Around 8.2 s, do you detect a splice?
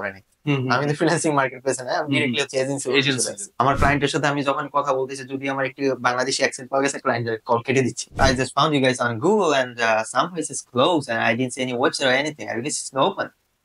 yes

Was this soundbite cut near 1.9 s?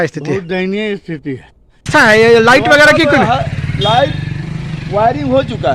yes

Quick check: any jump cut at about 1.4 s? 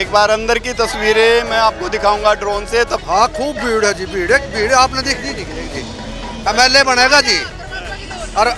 no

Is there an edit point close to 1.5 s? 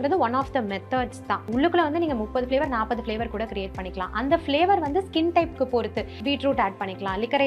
yes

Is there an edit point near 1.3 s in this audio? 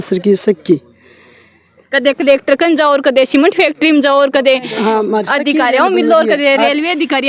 no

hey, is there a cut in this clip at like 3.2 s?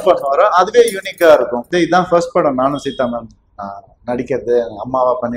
no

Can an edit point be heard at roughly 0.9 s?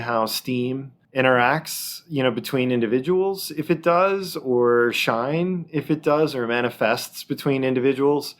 yes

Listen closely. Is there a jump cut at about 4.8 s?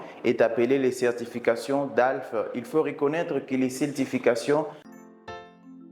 yes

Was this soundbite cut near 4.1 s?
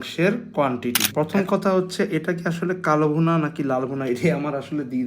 no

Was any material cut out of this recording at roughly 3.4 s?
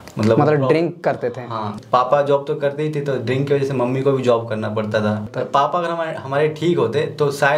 no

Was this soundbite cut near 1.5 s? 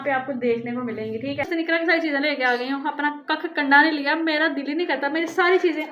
yes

